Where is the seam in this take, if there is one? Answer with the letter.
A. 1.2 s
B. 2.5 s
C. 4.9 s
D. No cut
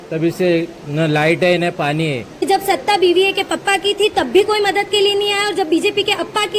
B